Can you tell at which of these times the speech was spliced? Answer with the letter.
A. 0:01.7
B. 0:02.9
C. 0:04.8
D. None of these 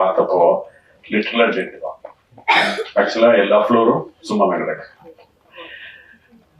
D